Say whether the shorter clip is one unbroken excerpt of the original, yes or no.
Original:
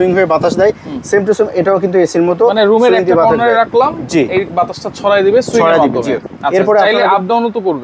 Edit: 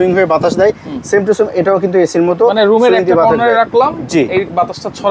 yes